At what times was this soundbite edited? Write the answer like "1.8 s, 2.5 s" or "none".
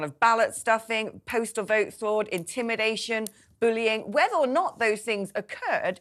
none